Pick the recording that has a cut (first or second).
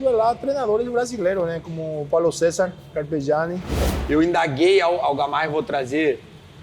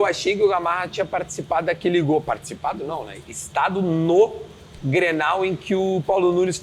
first